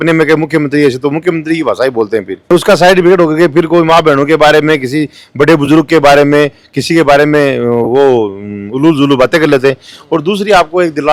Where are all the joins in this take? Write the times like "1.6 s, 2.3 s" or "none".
none